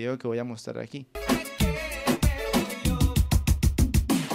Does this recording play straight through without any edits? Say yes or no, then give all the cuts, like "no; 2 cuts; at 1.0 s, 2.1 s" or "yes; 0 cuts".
no; 1 cut; at 1.1 s